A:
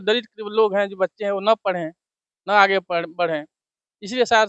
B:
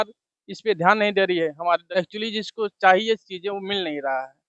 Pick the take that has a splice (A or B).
B